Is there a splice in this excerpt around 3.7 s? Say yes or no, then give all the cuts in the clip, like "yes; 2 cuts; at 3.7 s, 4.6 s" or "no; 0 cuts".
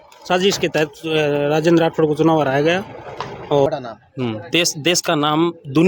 yes; 1 cut; at 3.7 s